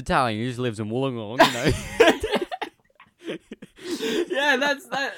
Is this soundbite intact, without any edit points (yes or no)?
no